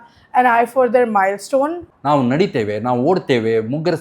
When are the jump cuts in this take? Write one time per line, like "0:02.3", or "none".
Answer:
0:01.9